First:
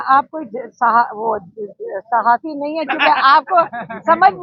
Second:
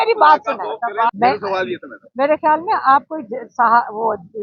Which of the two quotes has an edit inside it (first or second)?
second